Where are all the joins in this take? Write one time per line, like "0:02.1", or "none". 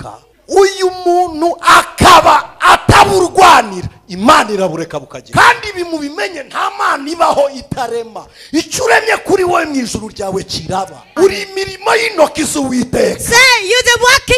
0:05.2
0:11.1